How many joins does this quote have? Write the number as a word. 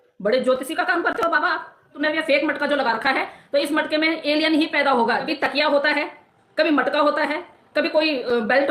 two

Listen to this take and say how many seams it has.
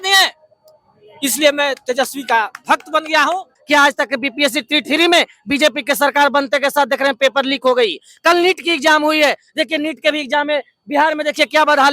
one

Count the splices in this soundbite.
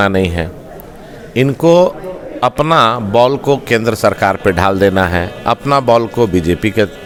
zero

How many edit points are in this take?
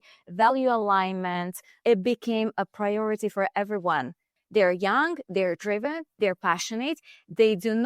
two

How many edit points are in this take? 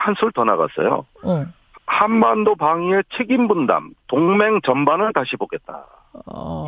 one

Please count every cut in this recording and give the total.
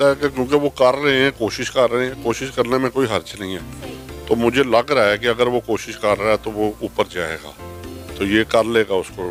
zero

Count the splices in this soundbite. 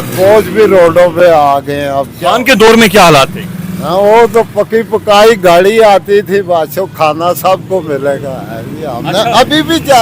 zero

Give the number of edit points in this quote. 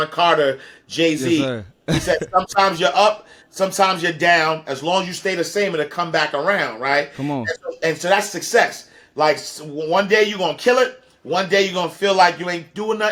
zero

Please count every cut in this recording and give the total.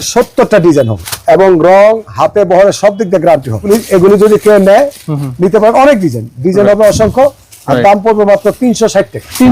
two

